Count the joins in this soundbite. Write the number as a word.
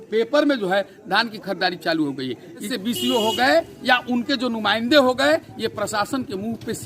one